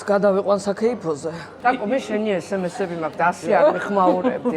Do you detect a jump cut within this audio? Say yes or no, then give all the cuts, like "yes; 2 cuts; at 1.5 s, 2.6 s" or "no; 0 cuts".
yes; 1 cut; at 1.5 s